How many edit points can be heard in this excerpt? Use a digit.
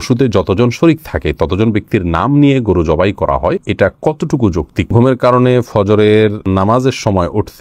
3